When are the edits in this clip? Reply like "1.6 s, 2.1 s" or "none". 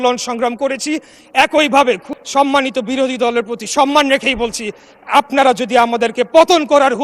2.1 s